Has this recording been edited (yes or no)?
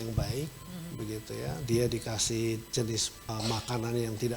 yes